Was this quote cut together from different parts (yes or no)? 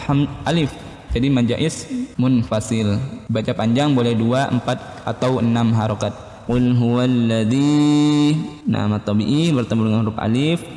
yes